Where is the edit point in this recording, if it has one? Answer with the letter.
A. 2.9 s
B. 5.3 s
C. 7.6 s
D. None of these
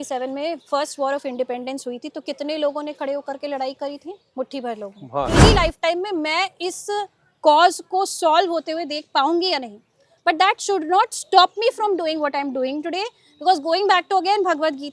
B